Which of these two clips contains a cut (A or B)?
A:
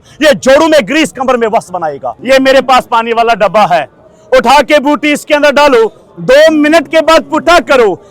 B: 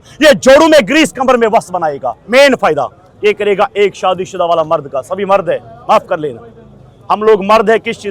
A